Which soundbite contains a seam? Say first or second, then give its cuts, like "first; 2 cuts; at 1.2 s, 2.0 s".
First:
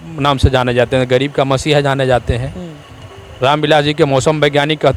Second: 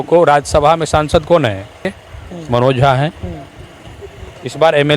second; 1 cut; at 2.1 s